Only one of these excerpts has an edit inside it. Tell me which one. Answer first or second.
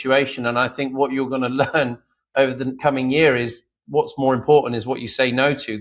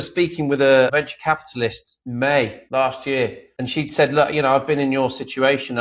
second